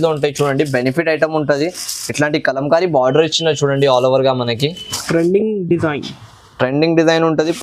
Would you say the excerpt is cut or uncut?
uncut